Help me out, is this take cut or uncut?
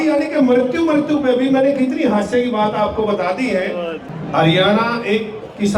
cut